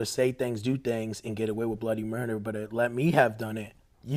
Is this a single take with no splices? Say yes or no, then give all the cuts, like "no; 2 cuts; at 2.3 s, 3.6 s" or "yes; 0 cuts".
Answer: yes; 0 cuts